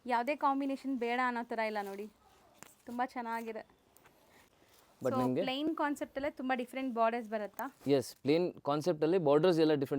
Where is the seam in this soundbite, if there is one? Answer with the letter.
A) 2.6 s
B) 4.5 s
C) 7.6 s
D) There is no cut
B